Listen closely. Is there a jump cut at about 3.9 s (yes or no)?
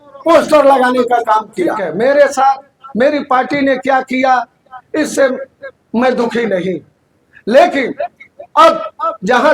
no